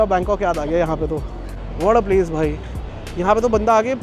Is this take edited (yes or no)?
yes